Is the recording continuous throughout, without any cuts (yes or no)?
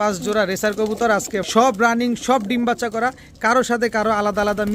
no